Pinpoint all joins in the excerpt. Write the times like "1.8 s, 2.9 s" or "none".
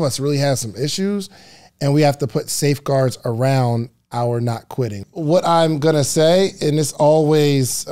5.0 s